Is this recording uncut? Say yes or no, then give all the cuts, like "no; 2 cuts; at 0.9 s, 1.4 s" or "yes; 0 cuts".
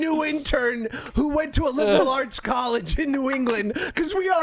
yes; 0 cuts